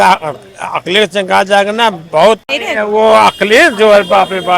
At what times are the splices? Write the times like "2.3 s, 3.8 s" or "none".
2.6 s